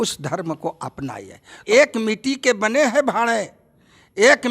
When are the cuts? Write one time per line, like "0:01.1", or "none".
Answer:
0:01.6

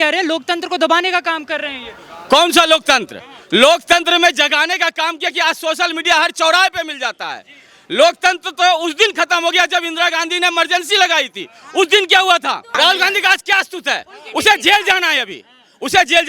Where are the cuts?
0:12.7

